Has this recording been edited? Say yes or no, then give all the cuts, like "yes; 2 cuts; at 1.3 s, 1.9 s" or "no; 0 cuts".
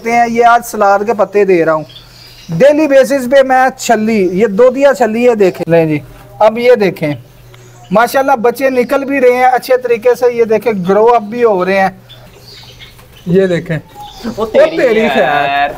yes; 2 cuts; at 5.6 s, 12.3 s